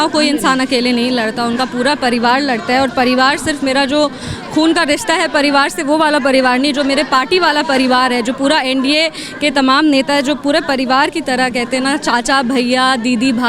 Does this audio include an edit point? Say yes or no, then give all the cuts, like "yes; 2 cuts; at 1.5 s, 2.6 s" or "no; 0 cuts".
no; 0 cuts